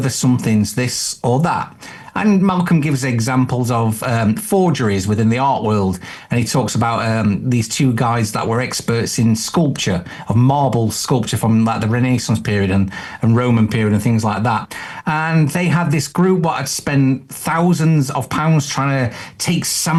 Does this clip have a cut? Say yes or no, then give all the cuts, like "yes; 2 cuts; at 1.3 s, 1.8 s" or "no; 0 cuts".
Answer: no; 0 cuts